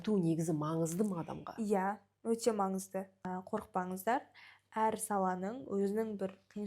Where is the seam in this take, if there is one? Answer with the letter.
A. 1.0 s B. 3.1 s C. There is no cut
B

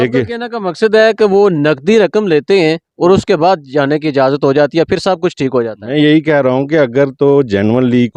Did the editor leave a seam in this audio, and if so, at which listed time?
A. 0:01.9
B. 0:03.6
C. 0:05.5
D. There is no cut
D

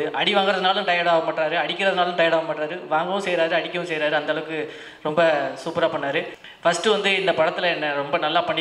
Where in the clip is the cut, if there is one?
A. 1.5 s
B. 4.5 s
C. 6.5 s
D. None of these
D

